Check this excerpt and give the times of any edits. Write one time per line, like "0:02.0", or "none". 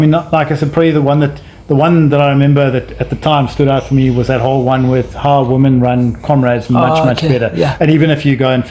none